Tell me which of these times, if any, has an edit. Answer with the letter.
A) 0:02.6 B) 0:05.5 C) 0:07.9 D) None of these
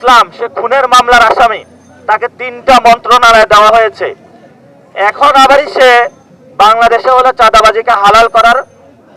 D